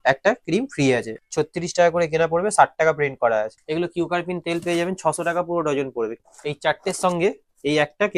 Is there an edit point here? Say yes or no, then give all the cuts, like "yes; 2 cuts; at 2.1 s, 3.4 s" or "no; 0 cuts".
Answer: yes; 3 cuts; at 1.2 s, 3.6 s, 6.2 s